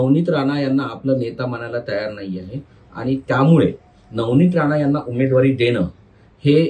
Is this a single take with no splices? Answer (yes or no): yes